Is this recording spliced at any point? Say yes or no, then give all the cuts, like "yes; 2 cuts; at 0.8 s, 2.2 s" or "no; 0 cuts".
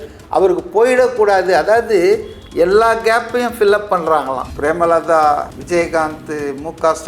yes; 1 cut; at 4.5 s